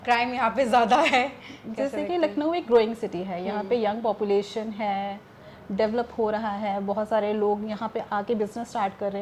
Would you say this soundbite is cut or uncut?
uncut